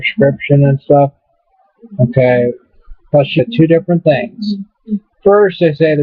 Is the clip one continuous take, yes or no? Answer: yes